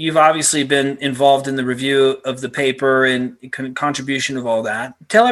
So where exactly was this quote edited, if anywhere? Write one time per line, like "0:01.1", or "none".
none

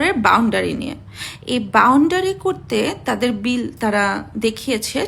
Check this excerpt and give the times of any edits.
none

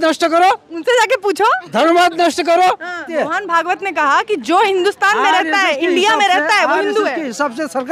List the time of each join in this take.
0:03.1

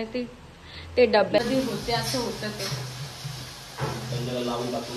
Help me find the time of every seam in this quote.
0:01.4

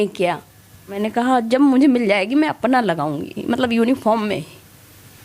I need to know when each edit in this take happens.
0:01.0

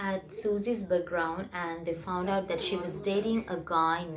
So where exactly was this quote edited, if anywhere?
none

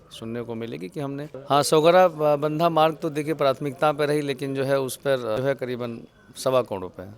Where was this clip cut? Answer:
0:00.9
0:05.1

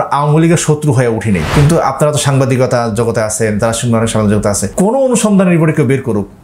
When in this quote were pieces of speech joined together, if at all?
0:01.5
0:04.6

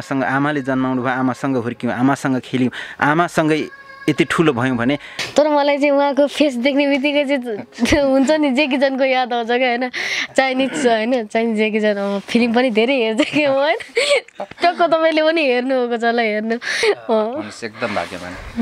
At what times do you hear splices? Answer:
0:05.1
0:16.8

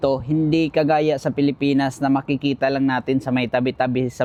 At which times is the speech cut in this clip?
none

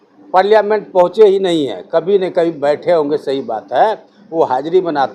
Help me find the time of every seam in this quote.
none

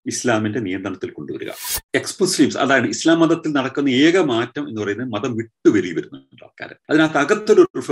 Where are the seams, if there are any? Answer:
0:01.6

